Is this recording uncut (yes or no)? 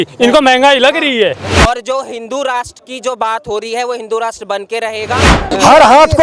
no